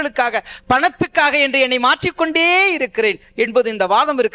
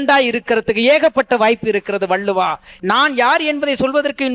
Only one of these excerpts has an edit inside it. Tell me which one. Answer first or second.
second